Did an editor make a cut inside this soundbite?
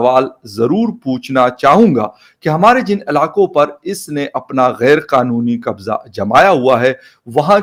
no; 0 cuts

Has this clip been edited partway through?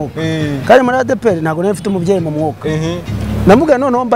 no; 0 cuts

